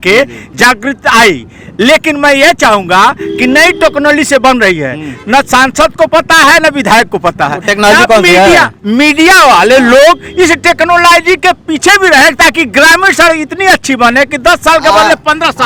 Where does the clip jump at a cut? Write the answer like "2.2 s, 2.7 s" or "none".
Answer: none